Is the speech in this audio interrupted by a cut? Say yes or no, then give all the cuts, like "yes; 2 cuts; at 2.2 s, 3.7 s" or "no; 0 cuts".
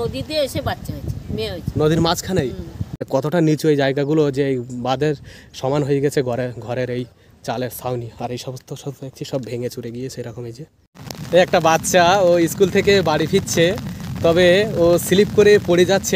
yes; 2 cuts; at 3.0 s, 11.2 s